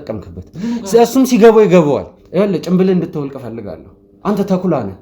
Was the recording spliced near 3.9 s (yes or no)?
no